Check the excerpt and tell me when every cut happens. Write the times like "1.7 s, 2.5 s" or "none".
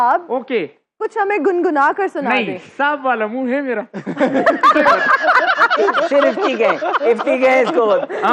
none